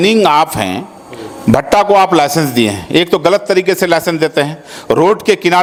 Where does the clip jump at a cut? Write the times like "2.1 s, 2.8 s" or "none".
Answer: none